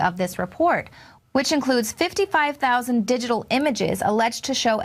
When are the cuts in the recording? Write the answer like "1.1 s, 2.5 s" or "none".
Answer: 2.2 s